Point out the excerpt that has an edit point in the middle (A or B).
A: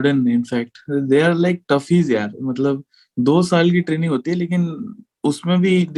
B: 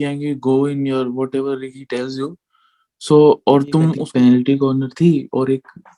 B